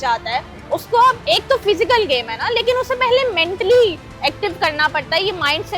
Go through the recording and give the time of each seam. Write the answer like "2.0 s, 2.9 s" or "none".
1.2 s